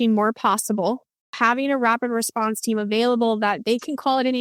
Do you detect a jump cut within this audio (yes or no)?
yes